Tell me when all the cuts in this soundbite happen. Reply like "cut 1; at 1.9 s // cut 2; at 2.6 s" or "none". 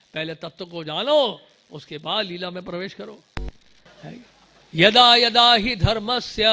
cut 1; at 3.9 s